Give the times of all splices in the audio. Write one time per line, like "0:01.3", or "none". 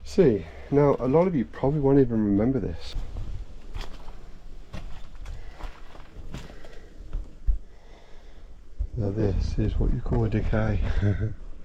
0:02.9